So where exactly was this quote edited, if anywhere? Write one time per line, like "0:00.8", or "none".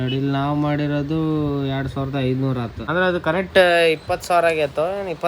0:02.8